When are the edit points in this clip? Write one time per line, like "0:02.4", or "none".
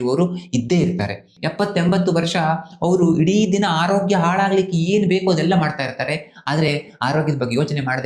0:01.4